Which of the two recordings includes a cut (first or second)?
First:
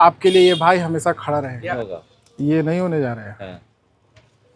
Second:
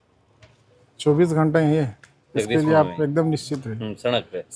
first